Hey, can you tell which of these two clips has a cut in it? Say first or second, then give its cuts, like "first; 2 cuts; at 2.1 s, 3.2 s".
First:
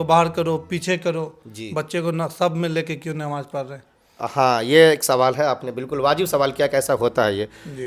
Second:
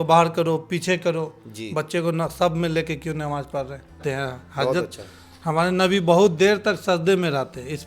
second; 1 cut; at 4.0 s